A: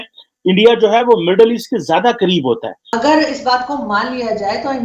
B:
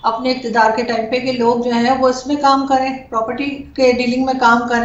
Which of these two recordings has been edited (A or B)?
A